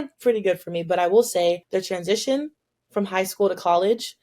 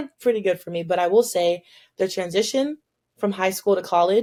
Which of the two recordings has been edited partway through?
first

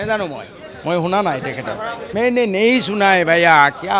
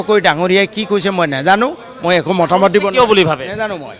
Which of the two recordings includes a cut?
first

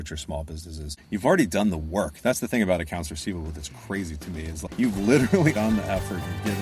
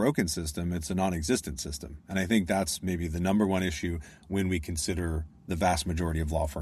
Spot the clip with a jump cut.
first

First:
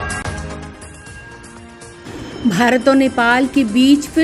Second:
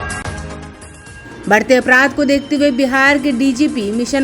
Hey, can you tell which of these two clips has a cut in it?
second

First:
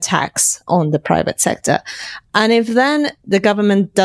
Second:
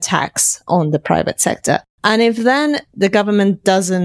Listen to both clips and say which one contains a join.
second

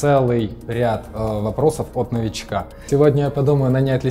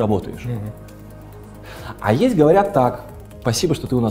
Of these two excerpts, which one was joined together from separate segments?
first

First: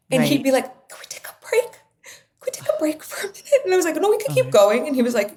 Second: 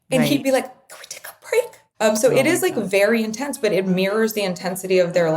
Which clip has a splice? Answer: second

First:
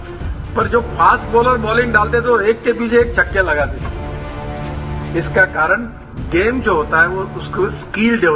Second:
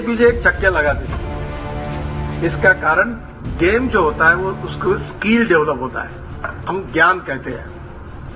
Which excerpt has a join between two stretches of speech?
second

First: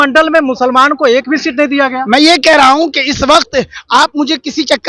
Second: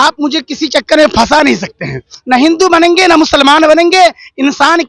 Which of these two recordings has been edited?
second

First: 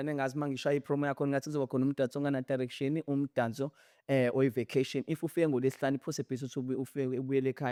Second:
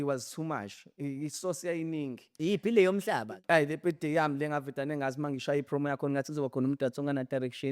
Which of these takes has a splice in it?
second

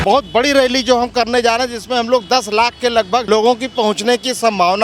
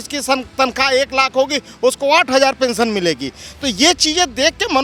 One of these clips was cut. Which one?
first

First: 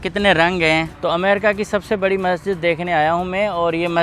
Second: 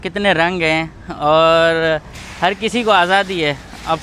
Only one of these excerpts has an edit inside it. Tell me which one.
first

